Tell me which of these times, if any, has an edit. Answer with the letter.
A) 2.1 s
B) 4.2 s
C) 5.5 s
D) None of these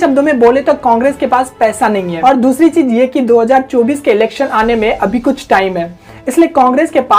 A